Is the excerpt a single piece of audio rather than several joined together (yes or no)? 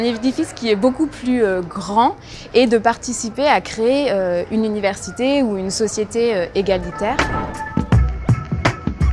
no